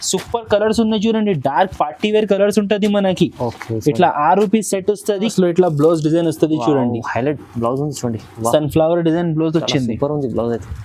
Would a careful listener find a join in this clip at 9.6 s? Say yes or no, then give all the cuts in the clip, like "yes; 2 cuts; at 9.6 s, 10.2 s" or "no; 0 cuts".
no; 1 cut; at 5.3 s